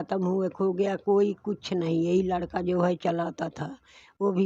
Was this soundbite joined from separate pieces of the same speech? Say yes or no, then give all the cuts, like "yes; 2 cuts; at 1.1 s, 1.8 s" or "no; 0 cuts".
no; 0 cuts